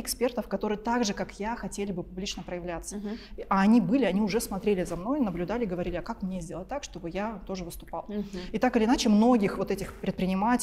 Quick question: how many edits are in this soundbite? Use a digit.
0